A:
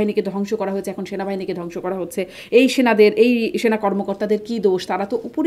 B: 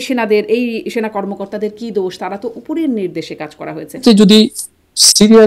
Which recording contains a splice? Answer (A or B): B